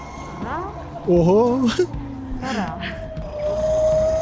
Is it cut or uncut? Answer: cut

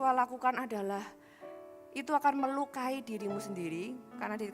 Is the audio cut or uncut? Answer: uncut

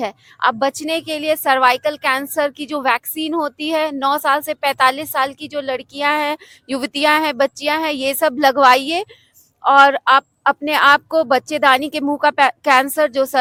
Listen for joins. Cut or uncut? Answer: uncut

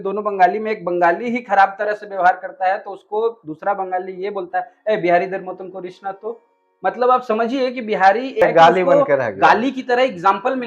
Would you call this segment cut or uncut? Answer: cut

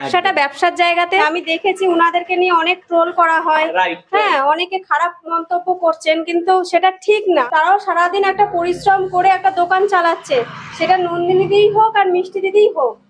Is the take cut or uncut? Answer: cut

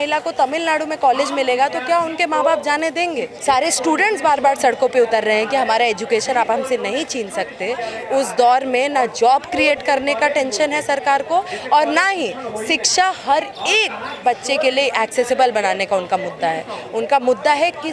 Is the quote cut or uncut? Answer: cut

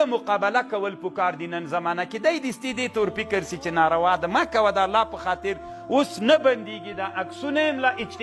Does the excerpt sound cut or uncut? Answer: uncut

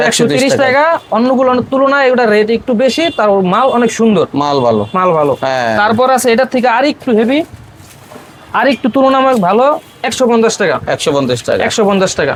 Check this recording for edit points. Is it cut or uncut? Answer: uncut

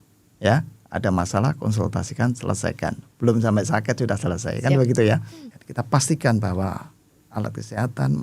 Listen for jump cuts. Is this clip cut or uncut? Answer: cut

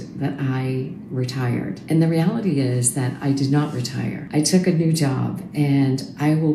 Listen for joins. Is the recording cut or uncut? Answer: uncut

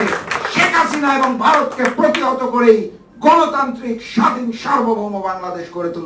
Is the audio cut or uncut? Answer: uncut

